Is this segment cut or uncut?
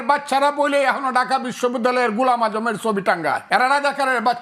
uncut